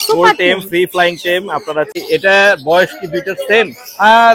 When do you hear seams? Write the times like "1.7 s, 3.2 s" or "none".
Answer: 1.9 s